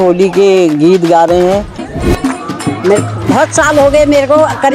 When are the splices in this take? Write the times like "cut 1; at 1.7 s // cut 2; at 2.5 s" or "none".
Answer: cut 1; at 1.9 s